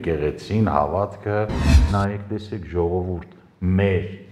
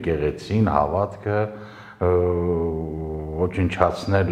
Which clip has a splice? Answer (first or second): first